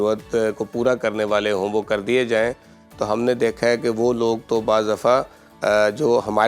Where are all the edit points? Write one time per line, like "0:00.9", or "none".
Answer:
none